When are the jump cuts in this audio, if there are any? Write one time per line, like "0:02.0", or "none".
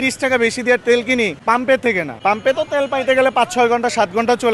0:01.4
0:02.1